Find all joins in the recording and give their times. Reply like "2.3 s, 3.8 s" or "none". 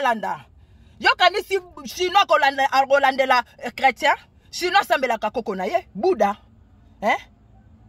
none

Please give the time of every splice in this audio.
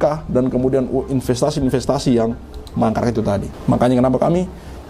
3.5 s

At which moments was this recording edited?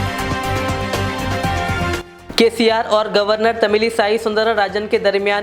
2.0 s

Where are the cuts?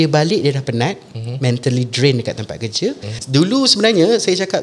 3.1 s

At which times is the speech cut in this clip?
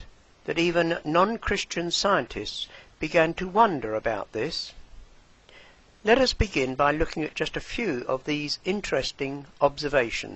1.7 s

